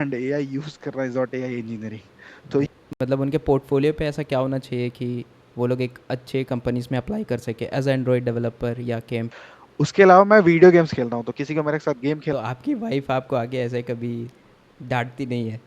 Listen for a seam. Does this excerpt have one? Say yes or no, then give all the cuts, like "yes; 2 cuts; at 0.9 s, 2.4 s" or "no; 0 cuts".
yes; 3 cuts; at 2.7 s, 9.3 s, 12.3 s